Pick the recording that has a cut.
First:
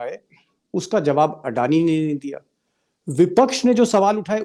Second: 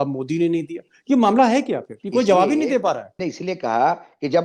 second; 2 cuts; at 1.9 s, 3.1 s

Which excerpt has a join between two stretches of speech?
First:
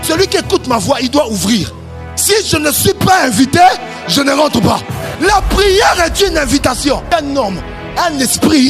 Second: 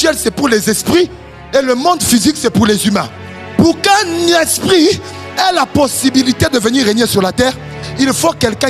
first; 2 cuts; at 5.0 s, 7.0 s

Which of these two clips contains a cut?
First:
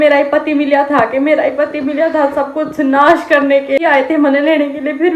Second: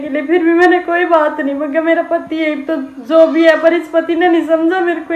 first; 1 cut; at 3.8 s

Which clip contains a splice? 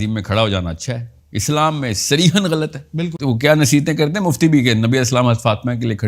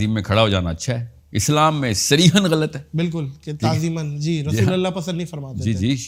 first; 1 cut; at 3.2 s

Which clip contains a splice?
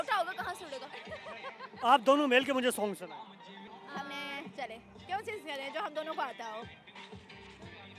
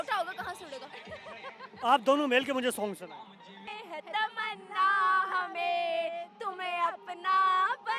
second; 1 cut; at 3.7 s

